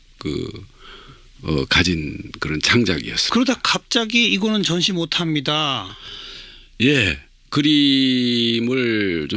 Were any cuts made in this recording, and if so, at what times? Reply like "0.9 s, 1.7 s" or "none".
none

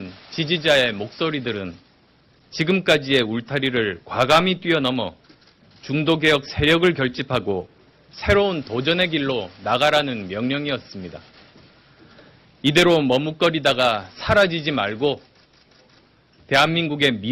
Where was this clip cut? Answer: 15.5 s

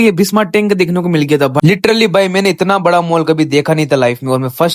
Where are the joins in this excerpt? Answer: 1.6 s

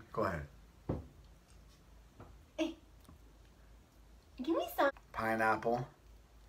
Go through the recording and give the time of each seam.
4.9 s

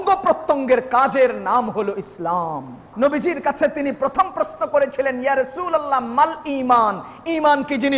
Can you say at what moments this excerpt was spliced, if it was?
2.9 s

